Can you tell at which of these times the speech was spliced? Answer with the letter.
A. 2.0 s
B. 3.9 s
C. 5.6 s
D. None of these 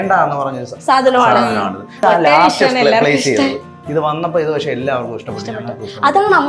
A